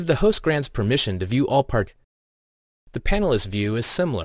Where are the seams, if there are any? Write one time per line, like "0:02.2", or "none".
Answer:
none